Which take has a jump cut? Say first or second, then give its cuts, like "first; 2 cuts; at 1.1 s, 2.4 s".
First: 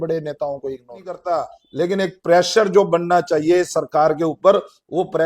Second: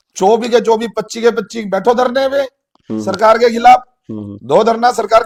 first; 1 cut; at 1.2 s